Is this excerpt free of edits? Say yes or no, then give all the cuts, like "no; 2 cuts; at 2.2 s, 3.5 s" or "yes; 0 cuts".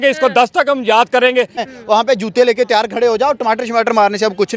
no; 1 cut; at 1.7 s